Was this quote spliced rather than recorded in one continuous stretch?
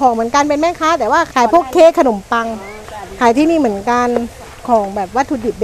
yes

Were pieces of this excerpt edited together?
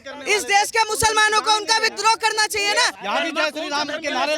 yes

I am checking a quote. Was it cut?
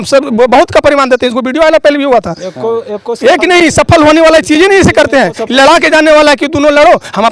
no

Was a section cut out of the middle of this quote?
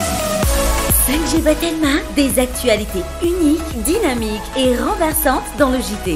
no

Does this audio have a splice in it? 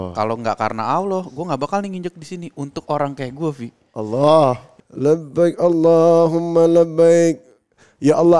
yes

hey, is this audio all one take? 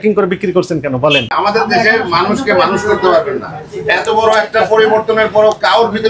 no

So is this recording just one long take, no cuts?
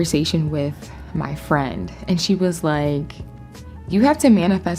yes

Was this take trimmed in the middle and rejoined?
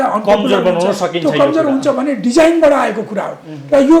no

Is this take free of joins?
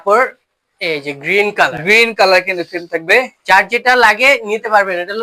yes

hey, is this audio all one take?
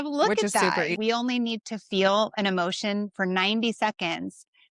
no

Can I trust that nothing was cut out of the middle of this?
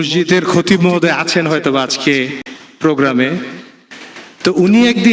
yes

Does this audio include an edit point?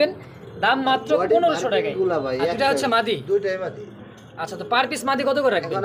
yes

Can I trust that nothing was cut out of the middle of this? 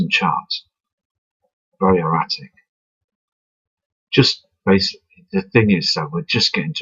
no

